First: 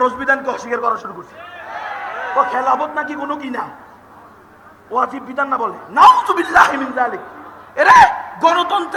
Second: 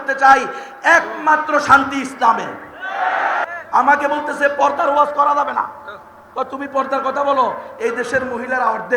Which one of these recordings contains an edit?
second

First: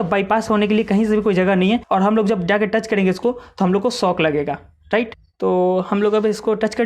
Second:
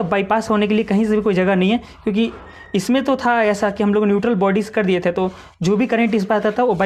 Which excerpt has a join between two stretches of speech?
first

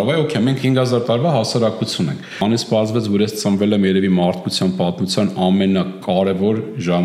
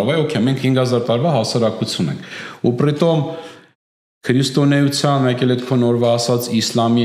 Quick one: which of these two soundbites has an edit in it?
first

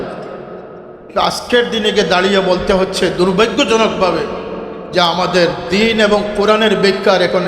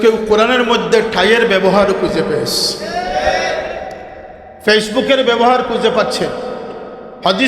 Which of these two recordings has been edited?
first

